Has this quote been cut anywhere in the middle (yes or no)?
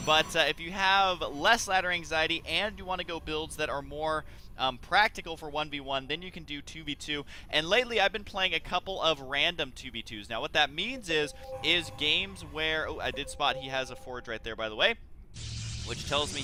no